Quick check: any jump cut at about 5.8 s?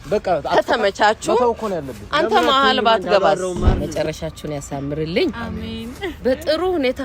no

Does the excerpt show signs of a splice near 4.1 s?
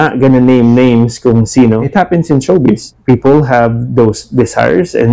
no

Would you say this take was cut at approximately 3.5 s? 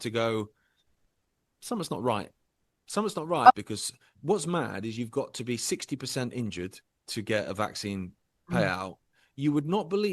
yes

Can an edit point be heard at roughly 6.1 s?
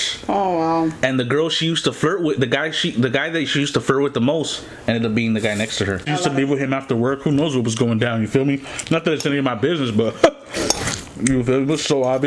yes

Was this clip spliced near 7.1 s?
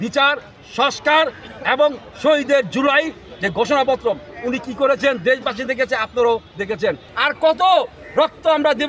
yes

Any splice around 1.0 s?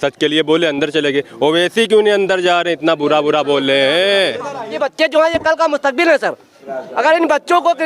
no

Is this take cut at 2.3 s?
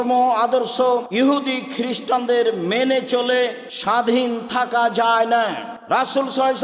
no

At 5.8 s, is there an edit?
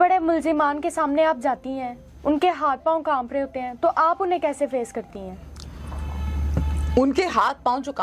no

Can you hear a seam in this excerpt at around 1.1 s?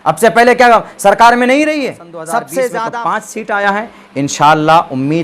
no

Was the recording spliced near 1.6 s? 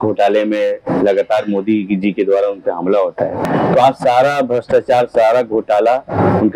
no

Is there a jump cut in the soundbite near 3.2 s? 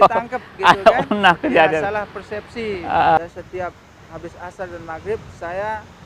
yes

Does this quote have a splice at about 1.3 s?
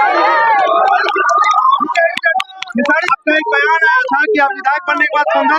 no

